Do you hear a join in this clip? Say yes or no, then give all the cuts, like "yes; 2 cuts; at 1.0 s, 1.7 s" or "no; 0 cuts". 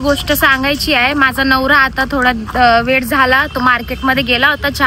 no; 0 cuts